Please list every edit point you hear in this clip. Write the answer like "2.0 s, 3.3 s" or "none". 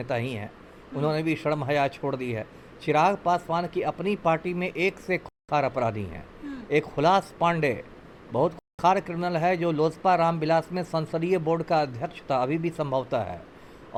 none